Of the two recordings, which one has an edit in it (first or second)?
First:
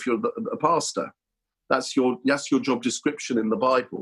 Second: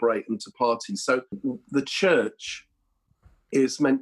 second